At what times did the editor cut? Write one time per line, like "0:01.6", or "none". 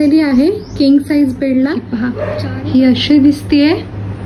0:02.2

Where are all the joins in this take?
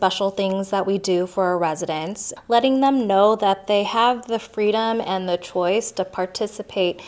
0:02.2

